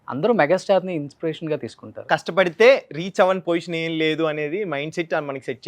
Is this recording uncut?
no; 1 cut; at 2.0 s

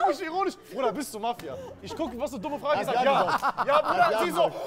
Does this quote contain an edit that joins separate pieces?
no; 0 cuts

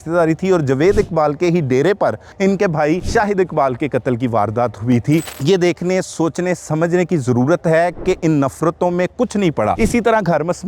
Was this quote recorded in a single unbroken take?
no; 4 cuts; at 2.3 s, 3.0 s, 5.3 s, 9.8 s

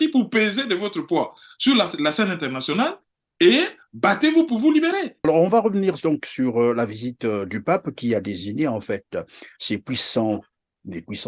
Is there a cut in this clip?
yes; 1 cut; at 5.1 s

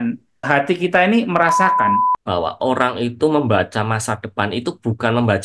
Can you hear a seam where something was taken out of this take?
yes; 1 cut; at 2.1 s

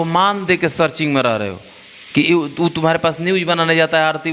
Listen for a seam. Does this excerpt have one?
no; 0 cuts

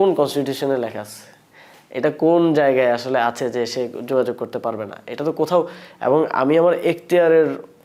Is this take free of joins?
yes; 0 cuts

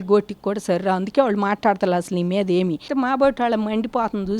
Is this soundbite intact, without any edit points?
no; 1 cut; at 2.9 s

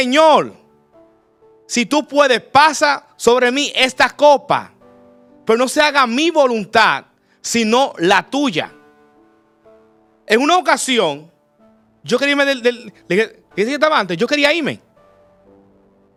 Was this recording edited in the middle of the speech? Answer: no; 0 cuts

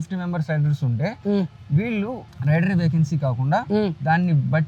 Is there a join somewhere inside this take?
no; 0 cuts

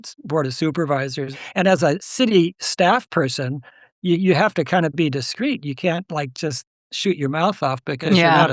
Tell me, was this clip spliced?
yes; 1 cut; at 1.3 s

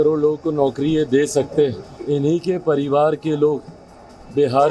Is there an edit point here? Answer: yes; 1 cut; at 2.0 s

